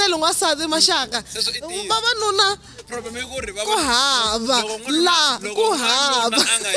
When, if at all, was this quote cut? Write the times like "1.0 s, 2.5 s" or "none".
none